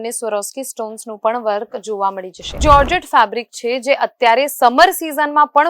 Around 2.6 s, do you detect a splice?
yes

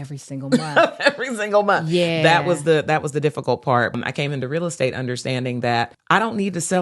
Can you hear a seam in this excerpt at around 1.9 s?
no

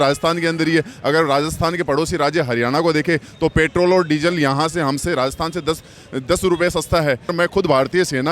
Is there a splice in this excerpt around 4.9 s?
no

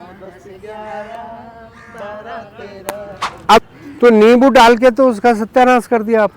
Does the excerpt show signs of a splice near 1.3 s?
no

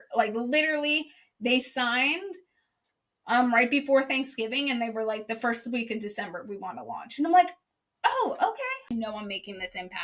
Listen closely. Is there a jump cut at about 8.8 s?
yes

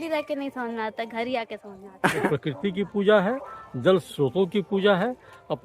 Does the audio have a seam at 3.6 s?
no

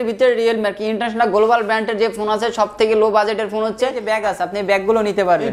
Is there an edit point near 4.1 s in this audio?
yes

